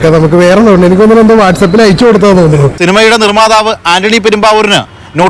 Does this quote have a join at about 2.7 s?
yes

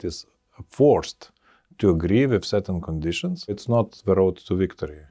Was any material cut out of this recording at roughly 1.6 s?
no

